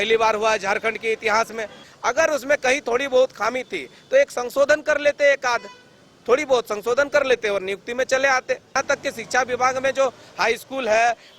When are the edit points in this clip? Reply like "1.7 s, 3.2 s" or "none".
1.8 s, 8.8 s